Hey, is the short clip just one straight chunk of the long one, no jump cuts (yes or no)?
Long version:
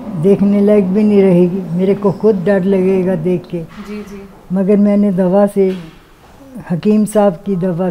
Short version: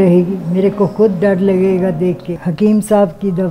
no